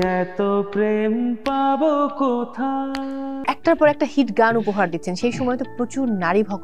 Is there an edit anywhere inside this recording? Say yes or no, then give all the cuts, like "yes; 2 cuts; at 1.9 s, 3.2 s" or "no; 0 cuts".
yes; 1 cut; at 3.4 s